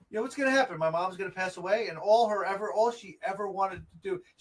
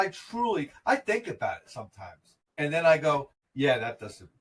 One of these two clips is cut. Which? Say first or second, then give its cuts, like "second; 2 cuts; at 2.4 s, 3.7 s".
second; 1 cut; at 3.4 s